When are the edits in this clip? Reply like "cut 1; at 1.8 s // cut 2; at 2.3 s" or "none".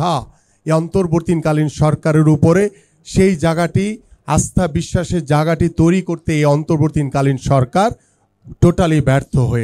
none